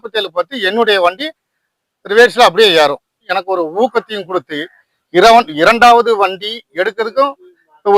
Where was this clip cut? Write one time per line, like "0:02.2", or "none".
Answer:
0:03.3